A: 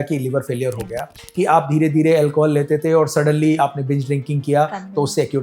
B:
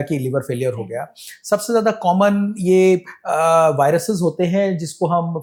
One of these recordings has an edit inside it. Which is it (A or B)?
A